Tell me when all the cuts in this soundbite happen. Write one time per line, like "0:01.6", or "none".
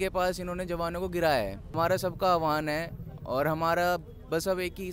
0:01.6